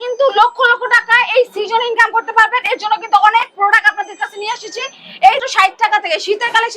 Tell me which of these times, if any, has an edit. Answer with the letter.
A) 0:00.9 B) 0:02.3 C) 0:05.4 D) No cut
C